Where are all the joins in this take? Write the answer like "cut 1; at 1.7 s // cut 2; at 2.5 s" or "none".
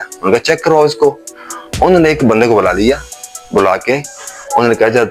none